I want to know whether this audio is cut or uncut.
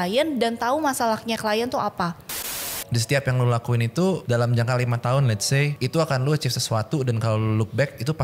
cut